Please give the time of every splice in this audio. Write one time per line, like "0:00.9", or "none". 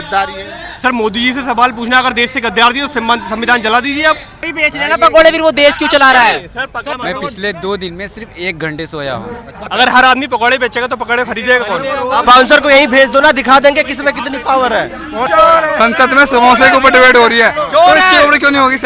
0:04.5
0:07.0
0:09.7
0:12.2
0:15.3